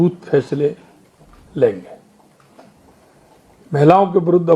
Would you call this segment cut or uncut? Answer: uncut